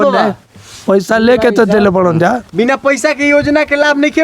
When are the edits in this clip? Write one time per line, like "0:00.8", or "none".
none